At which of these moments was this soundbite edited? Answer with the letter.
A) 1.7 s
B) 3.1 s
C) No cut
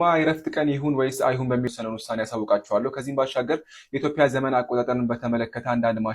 A